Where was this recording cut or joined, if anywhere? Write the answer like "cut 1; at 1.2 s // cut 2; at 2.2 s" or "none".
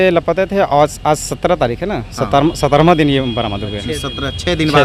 none